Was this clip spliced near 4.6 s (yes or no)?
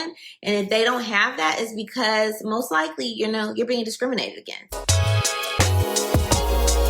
yes